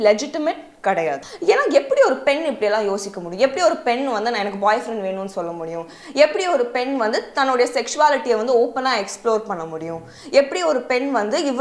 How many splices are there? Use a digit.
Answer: 1